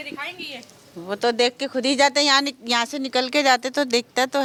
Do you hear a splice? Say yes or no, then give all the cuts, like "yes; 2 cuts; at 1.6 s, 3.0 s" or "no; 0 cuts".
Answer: no; 0 cuts